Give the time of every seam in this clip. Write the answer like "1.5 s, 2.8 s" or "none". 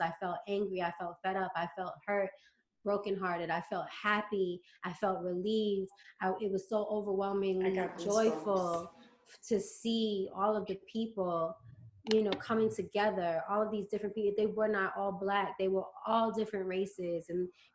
none